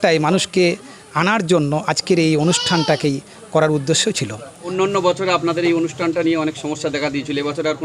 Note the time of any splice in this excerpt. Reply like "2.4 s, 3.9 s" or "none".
4.7 s